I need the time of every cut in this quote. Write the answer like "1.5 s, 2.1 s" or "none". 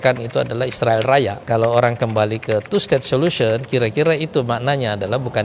1.4 s